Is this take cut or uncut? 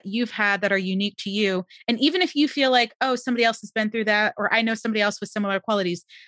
uncut